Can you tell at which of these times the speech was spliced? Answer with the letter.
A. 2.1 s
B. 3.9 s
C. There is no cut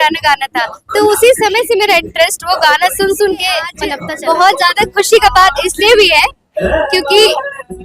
B